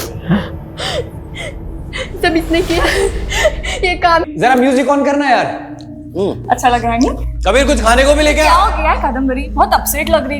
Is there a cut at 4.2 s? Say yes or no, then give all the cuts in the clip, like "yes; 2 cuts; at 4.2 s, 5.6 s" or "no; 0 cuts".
yes; 1 cut; at 4.2 s